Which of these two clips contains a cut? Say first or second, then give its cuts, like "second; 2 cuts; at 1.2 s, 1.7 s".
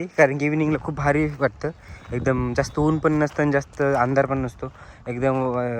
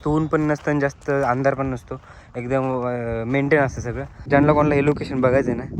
second; 1 cut; at 4.3 s